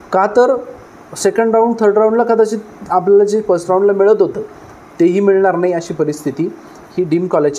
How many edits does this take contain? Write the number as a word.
zero